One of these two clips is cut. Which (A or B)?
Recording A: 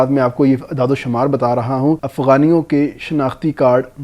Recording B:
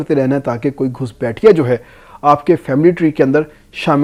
A